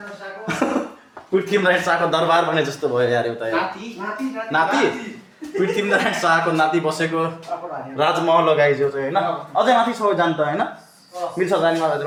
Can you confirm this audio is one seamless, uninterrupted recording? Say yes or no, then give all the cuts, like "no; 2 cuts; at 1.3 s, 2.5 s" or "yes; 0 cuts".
yes; 0 cuts